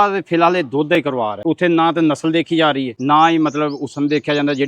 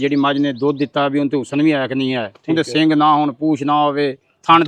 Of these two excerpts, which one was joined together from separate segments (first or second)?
first